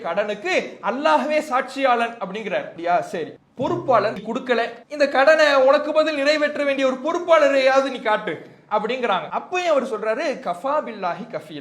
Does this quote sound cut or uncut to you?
cut